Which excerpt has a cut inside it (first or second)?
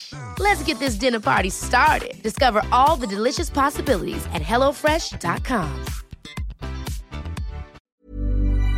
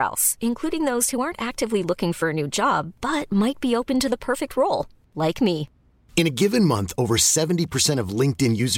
first